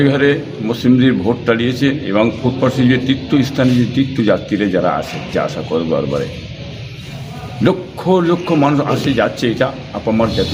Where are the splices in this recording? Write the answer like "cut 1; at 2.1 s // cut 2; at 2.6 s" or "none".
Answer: none